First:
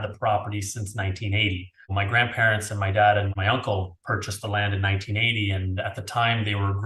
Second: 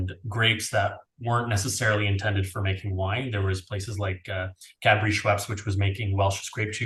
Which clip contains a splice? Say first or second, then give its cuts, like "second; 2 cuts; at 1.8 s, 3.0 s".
first; 2 cuts; at 1.9 s, 3.3 s